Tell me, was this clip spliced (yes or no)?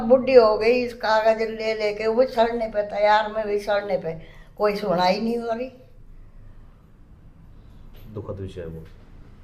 no